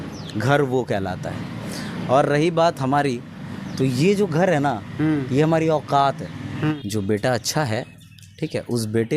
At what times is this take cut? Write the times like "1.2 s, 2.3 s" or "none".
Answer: 6.8 s